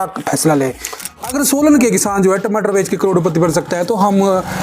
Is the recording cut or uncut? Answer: cut